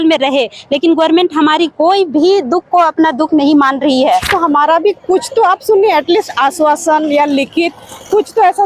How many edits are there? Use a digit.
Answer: 1